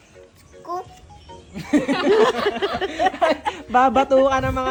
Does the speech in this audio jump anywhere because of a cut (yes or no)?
no